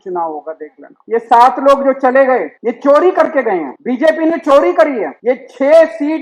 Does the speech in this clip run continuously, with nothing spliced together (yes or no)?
no